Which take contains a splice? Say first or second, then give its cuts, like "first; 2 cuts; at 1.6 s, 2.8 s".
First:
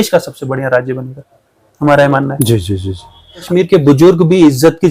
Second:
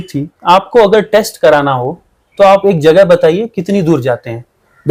first; 1 cut; at 3.5 s